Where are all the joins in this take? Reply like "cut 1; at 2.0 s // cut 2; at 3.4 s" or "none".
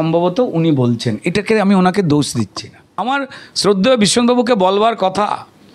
cut 1; at 3.0 s